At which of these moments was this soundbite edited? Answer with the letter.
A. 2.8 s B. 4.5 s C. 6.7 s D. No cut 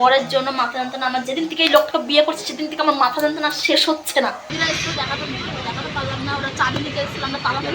B